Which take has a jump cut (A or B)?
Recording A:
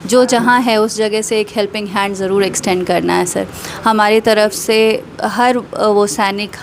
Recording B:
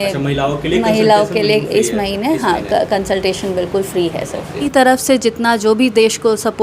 B